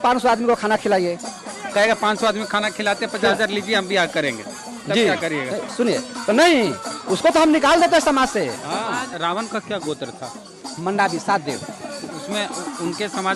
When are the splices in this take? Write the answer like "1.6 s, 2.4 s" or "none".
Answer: 9.1 s